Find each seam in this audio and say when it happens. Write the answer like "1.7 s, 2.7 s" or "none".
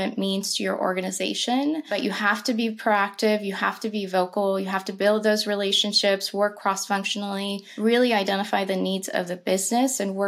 1.9 s, 7.6 s